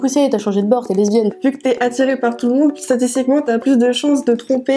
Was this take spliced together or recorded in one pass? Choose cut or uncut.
cut